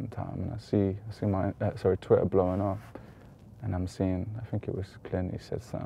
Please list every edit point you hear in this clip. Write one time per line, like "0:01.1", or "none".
none